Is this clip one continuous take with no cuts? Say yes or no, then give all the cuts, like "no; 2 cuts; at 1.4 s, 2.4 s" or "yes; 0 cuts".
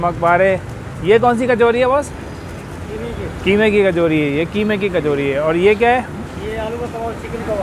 yes; 0 cuts